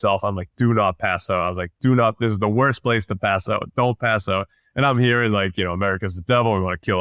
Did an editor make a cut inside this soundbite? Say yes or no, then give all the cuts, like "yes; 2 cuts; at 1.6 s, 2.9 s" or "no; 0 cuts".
no; 0 cuts